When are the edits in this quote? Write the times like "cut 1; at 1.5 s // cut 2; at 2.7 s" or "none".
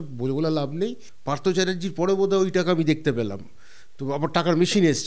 cut 1; at 1.1 s